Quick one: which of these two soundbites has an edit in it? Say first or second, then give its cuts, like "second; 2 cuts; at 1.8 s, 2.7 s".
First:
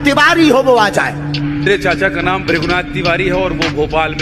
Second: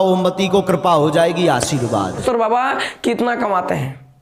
second; 1 cut; at 2.2 s